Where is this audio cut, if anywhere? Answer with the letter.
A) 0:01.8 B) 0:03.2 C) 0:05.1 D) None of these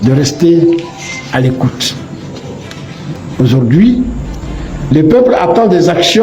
B